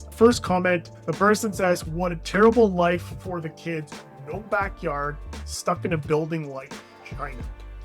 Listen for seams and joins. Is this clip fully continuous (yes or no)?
no